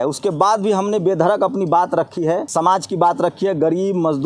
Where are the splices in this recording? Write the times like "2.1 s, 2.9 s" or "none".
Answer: 2.5 s